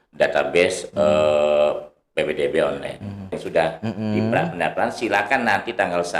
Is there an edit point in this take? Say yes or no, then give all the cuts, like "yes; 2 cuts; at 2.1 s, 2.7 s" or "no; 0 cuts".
yes; 1 cut; at 3.4 s